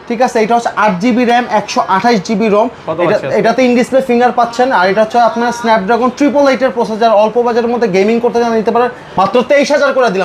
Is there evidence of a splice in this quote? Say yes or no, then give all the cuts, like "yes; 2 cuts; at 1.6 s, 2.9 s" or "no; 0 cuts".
yes; 1 cut; at 9.0 s